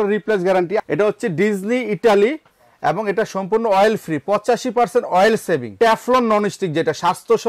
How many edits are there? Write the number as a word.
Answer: two